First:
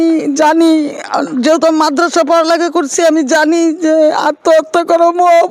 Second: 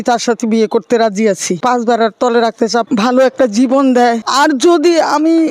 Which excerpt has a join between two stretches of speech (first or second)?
second